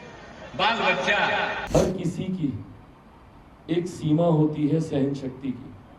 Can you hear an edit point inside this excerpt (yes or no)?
no